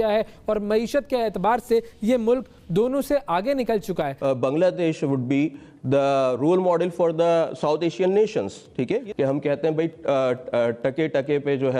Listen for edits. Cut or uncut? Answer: cut